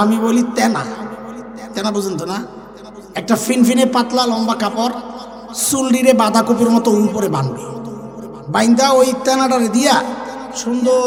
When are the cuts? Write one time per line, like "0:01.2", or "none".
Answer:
none

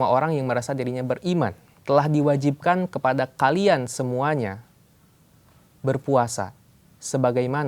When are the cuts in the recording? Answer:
0:01.7

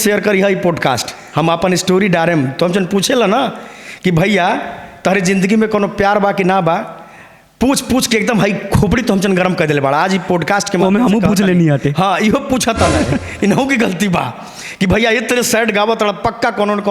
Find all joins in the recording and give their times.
none

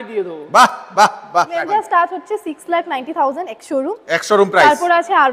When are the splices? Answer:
0:01.6

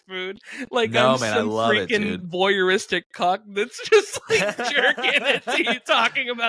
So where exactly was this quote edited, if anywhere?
none

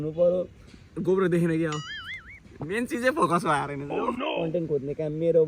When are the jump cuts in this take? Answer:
0:04.2

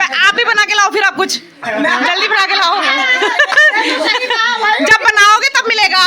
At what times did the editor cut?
none

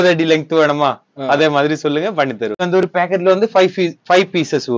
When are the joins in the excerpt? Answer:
0:02.6

